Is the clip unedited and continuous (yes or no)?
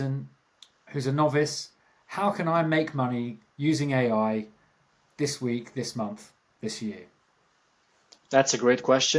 yes